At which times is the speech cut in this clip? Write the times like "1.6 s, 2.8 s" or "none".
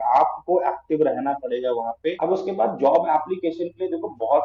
2.2 s